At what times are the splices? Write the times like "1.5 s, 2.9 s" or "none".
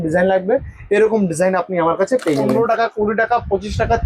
2.5 s